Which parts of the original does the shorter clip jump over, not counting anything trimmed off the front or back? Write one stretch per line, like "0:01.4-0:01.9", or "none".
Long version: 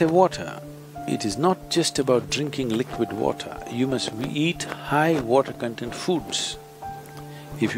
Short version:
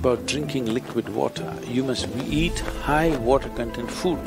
none